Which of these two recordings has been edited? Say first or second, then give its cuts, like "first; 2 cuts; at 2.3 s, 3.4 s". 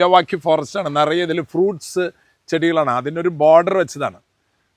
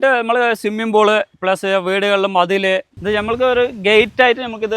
second; 1 cut; at 2.9 s